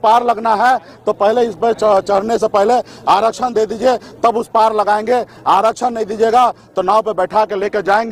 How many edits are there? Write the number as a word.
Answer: zero